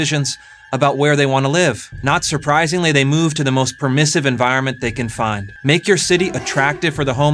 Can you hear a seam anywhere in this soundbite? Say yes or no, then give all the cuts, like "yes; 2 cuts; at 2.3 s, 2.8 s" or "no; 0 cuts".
yes; 2 cuts; at 1.9 s, 5.5 s